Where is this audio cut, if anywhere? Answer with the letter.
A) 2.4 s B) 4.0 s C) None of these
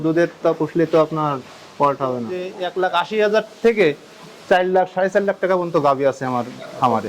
A